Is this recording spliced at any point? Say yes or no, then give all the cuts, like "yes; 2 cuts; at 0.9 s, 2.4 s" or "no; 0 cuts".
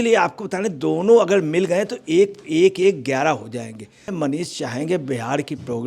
yes; 1 cut; at 4.1 s